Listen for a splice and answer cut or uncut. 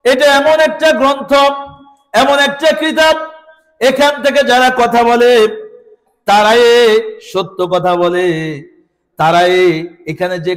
uncut